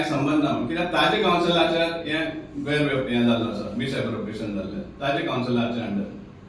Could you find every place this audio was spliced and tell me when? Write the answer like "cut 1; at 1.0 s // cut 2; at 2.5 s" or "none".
none